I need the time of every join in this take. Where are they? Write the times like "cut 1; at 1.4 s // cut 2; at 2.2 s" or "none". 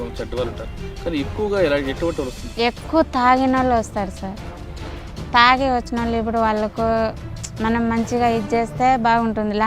cut 1; at 2.4 s